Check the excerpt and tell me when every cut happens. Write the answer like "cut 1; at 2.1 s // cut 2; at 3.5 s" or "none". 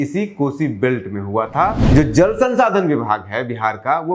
cut 1; at 1.8 s